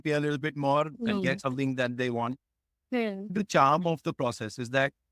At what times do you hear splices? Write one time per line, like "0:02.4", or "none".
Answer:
0:03.3